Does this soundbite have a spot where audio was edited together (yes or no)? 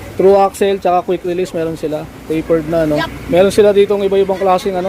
yes